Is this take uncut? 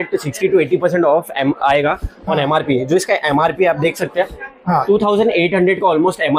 yes; 0 cuts

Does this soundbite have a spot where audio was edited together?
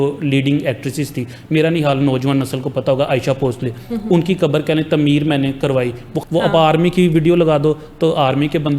yes; 1 cut; at 6.1 s

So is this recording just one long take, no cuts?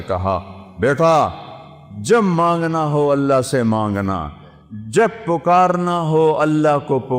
yes; 0 cuts

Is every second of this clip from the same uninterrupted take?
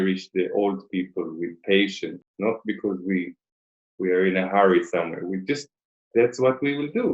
yes; 0 cuts

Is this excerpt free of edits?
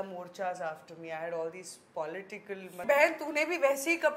no; 1 cut; at 2.8 s

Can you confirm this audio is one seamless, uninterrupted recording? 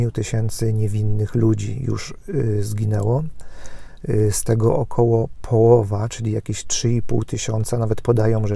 yes; 0 cuts

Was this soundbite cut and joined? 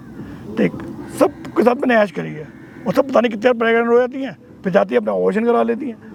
no; 0 cuts

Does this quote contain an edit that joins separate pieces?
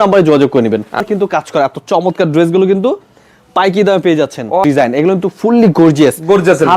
yes; 2 cuts; at 1.0 s, 4.6 s

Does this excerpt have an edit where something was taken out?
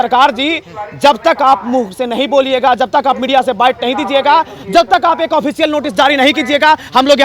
no; 0 cuts

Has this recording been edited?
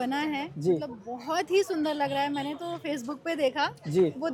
no; 0 cuts

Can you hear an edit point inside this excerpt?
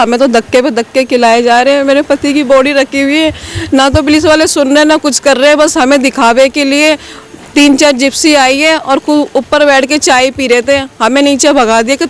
no; 0 cuts

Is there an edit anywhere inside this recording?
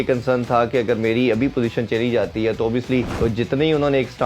yes; 1 cut; at 3.1 s

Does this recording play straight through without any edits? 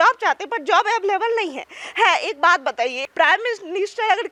yes; 0 cuts

